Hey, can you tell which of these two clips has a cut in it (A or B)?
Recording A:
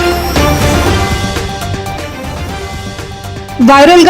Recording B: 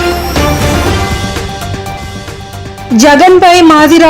B